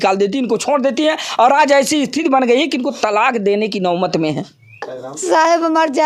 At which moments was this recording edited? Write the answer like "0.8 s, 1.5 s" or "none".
5.0 s